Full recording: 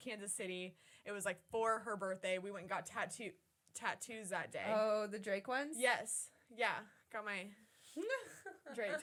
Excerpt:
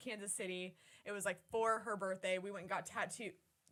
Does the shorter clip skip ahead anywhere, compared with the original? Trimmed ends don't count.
no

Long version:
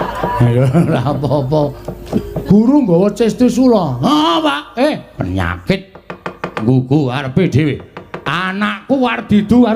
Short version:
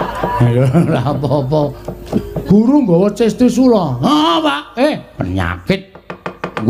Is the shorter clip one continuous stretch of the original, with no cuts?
yes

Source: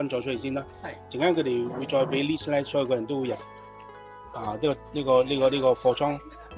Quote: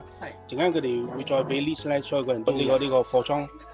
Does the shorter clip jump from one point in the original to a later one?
yes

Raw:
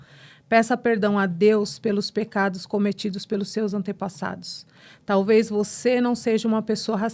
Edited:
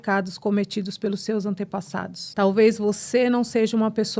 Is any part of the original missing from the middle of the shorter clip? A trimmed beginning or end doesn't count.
yes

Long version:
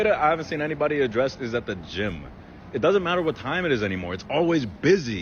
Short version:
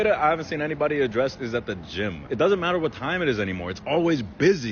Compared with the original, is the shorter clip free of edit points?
no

